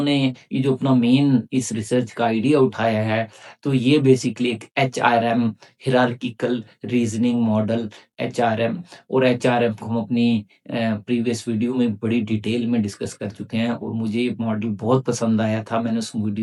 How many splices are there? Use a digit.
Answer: 0